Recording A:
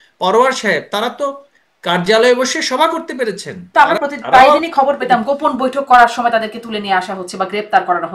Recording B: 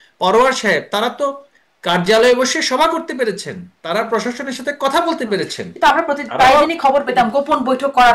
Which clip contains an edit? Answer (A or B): A